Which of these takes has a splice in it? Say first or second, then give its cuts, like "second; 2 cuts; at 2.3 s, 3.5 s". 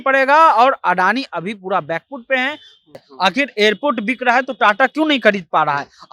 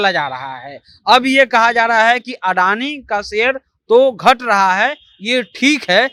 first; 1 cut; at 2.9 s